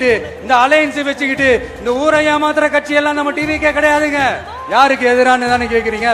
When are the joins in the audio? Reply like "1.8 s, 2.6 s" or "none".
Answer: 4.5 s